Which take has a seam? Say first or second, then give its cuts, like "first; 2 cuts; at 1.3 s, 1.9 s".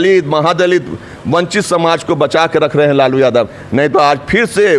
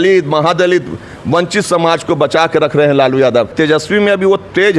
second; 1 cut; at 3.5 s